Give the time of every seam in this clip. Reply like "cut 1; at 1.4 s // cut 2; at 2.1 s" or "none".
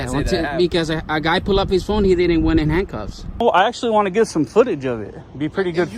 cut 1; at 3.4 s